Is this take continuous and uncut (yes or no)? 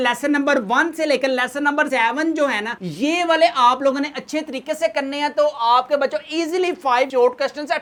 yes